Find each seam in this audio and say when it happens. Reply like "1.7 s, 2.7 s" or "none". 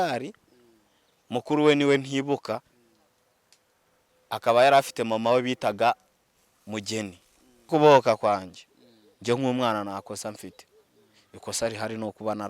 7.7 s